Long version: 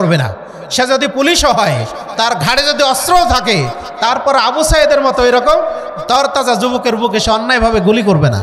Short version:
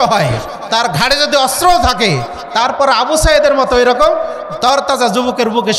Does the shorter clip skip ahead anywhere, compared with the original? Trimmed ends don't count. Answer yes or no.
no